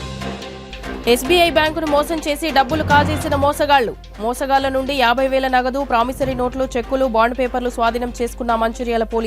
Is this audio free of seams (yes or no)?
no